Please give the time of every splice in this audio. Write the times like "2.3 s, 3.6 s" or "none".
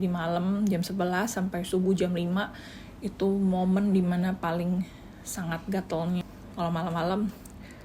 6.2 s